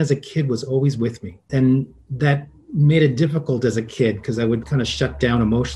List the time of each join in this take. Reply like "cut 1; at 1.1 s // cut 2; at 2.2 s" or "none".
cut 1; at 1.4 s // cut 2; at 4.6 s